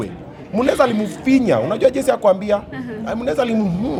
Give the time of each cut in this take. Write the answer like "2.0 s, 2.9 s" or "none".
none

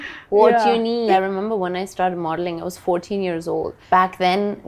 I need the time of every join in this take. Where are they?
1.1 s

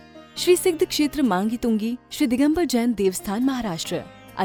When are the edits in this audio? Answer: none

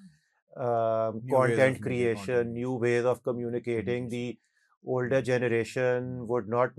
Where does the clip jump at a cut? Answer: none

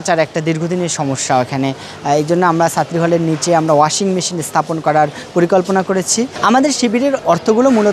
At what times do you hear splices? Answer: 6.3 s

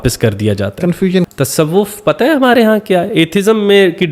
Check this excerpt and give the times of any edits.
1.3 s

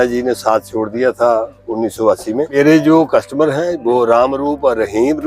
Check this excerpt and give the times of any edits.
2.5 s

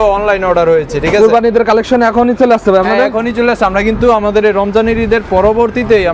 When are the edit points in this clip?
none

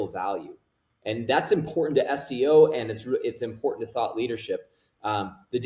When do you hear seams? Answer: none

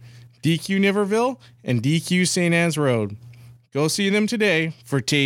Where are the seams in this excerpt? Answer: none

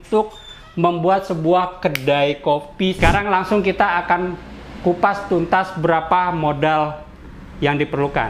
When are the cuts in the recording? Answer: 3.0 s

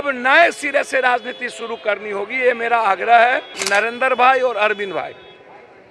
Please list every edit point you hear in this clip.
3.6 s

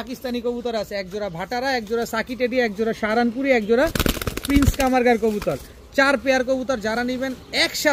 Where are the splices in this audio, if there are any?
none

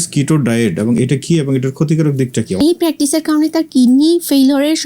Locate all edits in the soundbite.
2.6 s

